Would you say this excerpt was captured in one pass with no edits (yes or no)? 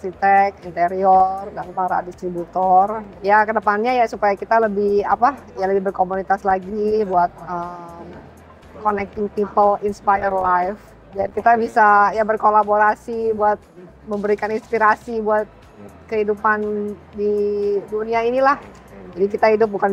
yes